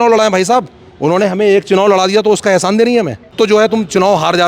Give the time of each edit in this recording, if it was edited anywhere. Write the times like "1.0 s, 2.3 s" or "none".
3.3 s